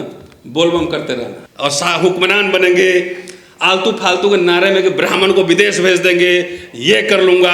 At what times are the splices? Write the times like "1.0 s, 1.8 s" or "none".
1.4 s